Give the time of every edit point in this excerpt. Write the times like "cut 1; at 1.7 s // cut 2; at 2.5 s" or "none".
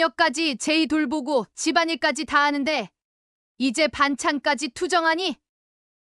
none